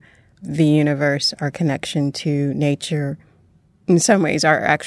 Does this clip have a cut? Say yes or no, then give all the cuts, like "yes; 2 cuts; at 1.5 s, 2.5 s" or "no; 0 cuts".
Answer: no; 0 cuts